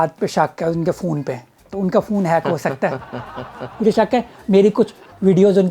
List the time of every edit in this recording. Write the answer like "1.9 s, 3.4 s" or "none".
3.7 s

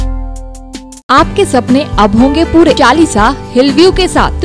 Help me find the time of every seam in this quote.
1.0 s, 2.8 s

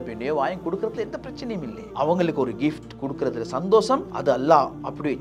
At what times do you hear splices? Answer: 1.8 s, 4.1 s

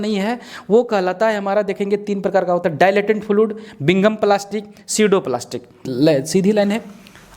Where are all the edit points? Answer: 5.9 s

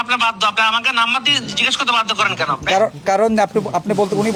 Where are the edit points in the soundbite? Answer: none

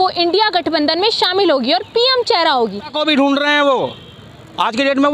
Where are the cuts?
2.9 s

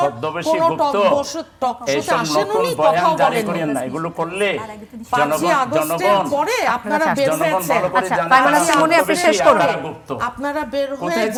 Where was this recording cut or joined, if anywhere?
none

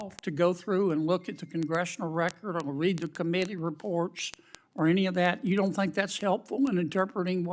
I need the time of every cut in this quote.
none

